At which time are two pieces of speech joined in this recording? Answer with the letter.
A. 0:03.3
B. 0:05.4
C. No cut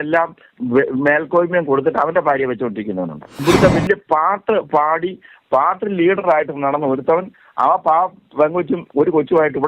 A